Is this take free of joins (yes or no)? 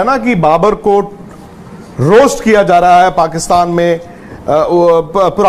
yes